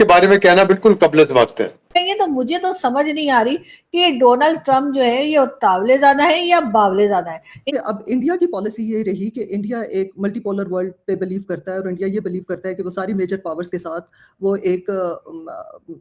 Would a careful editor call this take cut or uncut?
cut